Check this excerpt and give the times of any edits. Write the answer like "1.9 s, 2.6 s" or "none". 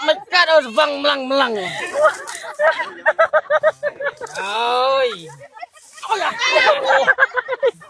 none